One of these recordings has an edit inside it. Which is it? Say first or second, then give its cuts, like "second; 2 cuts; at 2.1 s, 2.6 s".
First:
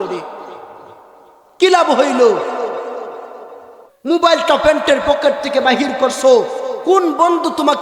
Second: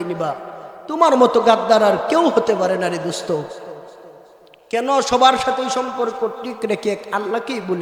first; 1 cut; at 4.0 s